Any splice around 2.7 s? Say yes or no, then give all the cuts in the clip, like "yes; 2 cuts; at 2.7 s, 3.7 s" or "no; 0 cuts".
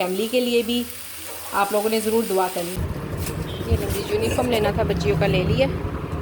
yes; 1 cut; at 2.7 s